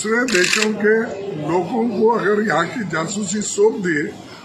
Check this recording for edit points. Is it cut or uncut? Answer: uncut